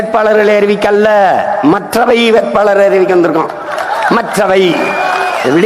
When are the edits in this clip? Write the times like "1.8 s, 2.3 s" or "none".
none